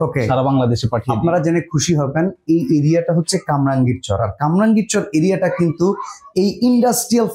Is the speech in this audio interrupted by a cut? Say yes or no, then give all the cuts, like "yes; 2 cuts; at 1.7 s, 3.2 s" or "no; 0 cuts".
no; 0 cuts